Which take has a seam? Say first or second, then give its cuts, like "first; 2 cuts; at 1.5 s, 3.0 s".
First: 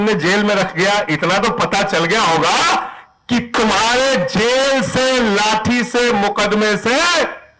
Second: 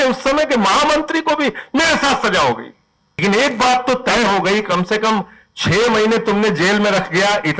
second; 1 cut; at 3.2 s